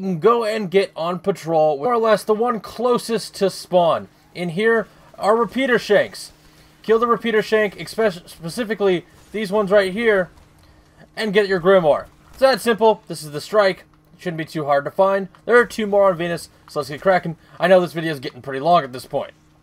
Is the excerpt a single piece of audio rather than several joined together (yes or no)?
yes